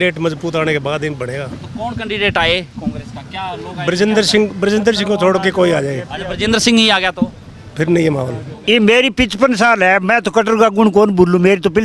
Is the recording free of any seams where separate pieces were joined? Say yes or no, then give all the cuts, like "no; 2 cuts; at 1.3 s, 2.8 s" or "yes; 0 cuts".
no; 1 cut; at 8.5 s